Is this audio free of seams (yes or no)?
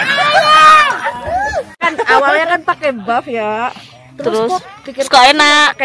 no